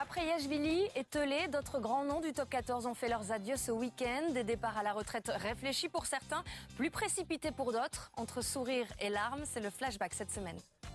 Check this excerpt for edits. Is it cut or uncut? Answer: cut